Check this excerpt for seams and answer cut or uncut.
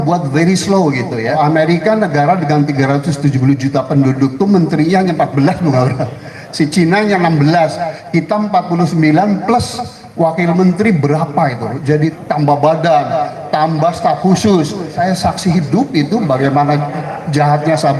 cut